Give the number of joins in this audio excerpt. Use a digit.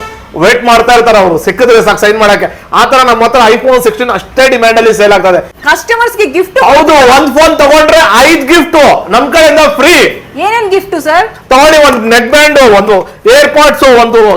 1